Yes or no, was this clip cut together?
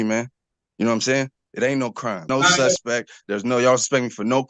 yes